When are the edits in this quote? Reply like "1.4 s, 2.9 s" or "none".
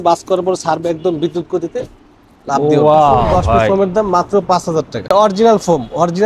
3.7 s, 5.1 s